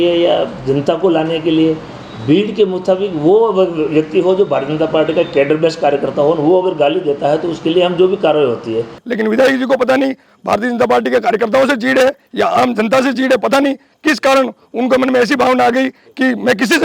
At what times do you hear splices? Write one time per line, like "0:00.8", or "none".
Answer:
0:09.0

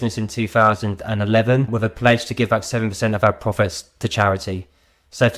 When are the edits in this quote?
0:01.7

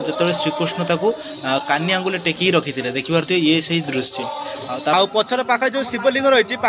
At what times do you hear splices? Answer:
0:04.9

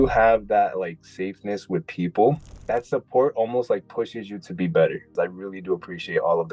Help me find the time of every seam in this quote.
0:02.5
0:05.1

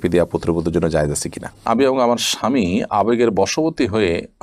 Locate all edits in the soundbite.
0:01.6

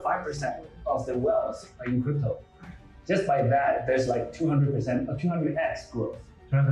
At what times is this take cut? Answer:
none

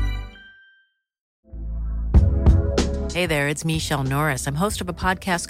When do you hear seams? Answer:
0:01.3

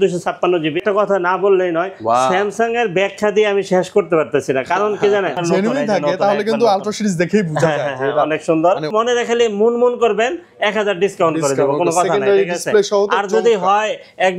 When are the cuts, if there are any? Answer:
0:00.8
0:05.4
0:08.9

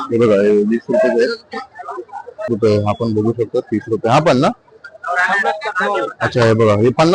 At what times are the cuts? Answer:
0:02.5

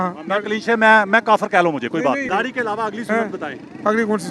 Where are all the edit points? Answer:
0:02.3

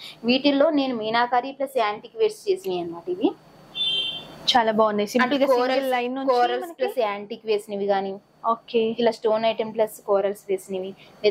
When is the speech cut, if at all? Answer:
none

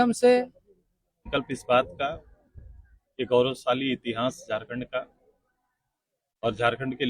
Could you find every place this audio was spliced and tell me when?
0:01.3

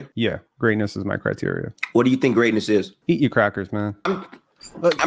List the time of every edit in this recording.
none

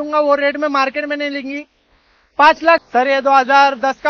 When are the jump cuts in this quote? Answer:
0:02.8

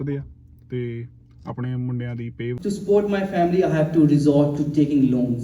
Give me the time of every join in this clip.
0:02.6

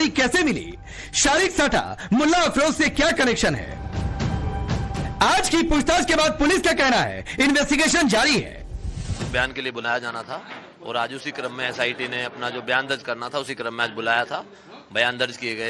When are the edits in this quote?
none

